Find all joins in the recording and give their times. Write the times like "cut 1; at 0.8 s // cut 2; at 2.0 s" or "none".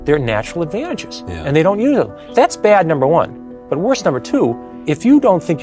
cut 1; at 2.2 s // cut 2; at 4.7 s

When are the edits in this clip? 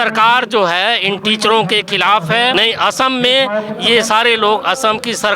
cut 1; at 2.5 s

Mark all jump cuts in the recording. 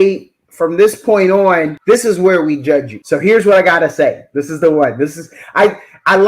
cut 1; at 1.7 s // cut 2; at 3.0 s

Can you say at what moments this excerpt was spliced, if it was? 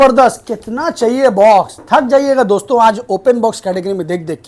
none

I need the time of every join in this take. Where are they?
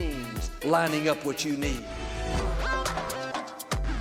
none

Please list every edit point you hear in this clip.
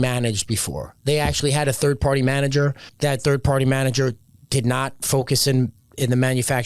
cut 1; at 2.8 s

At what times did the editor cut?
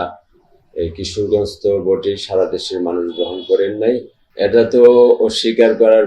cut 1; at 4.2 s

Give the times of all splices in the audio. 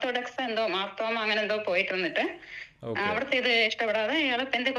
none

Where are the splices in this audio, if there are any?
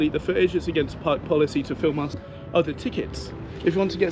cut 1; at 2.1 s

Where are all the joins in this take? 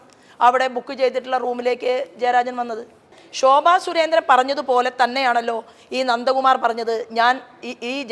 cut 1; at 3.2 s

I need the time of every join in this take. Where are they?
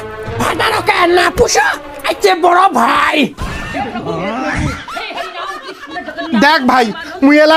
none

